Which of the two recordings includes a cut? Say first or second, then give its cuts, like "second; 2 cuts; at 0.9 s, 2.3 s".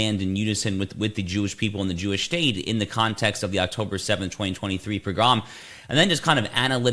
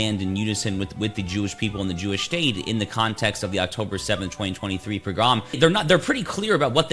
second; 1 cut; at 5.6 s